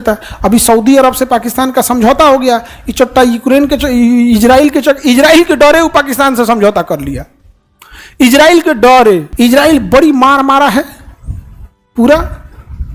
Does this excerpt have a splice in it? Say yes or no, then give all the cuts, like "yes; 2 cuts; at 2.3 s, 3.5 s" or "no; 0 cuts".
no; 0 cuts